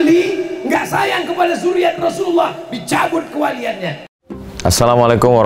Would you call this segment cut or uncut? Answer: cut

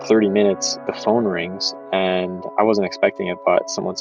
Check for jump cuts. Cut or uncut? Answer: uncut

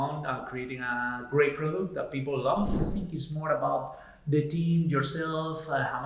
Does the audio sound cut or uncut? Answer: cut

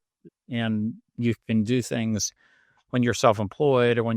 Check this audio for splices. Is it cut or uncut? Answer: cut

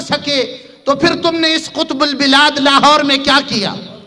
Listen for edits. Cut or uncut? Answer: uncut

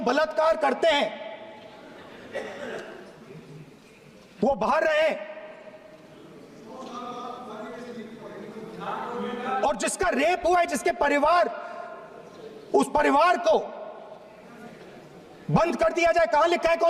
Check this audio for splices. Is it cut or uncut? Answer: uncut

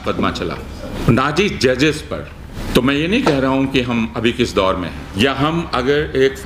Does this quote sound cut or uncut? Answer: cut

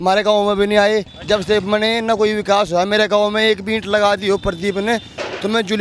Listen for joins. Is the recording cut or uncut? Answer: uncut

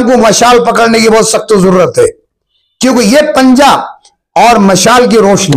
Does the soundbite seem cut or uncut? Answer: uncut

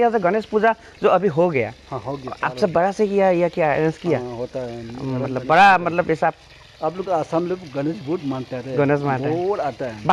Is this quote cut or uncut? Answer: uncut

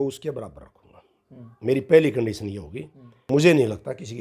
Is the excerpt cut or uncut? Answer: cut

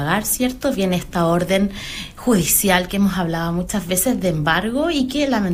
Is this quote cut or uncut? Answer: uncut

